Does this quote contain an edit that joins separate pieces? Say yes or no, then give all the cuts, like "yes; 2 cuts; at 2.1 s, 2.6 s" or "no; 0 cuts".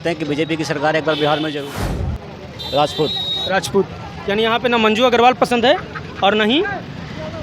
yes; 1 cut; at 1.8 s